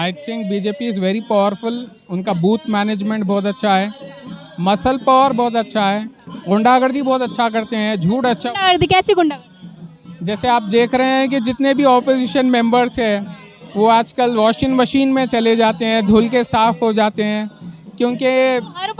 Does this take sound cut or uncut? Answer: uncut